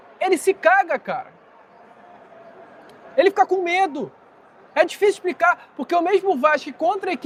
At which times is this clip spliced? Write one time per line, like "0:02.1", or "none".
none